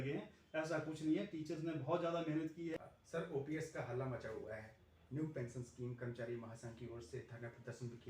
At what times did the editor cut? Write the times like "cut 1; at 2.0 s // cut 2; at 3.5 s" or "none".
cut 1; at 2.7 s